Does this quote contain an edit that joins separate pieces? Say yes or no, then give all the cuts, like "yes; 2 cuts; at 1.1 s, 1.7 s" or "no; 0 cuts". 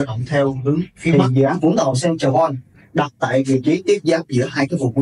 yes; 1 cut; at 1.1 s